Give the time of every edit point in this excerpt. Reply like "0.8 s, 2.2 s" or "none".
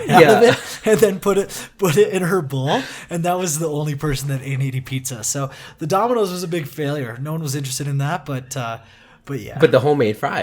9.5 s